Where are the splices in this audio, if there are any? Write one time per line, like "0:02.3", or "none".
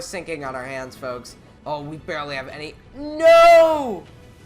0:01.5